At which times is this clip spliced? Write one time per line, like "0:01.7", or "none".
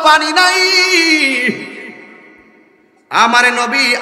none

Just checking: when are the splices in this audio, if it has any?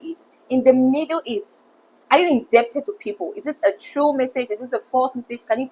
none

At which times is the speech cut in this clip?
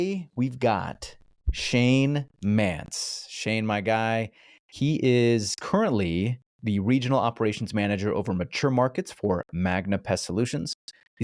none

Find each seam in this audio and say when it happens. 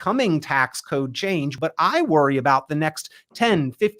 0:01.5

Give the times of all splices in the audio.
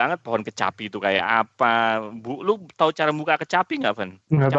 none

